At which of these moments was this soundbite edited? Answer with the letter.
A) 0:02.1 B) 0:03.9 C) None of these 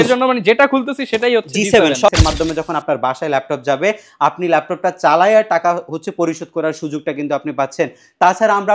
A